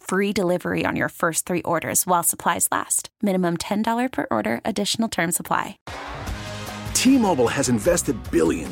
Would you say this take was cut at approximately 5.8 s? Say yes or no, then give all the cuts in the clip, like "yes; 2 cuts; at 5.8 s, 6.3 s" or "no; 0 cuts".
yes; 1 cut; at 5.8 s